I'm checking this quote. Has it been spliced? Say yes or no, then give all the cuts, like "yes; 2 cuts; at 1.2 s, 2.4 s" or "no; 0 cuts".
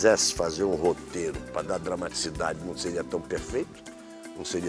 no; 0 cuts